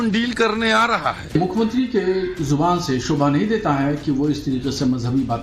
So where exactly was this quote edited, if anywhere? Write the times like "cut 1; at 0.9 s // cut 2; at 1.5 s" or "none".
cut 1; at 1.3 s